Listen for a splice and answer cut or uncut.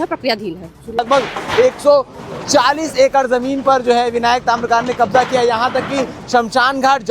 cut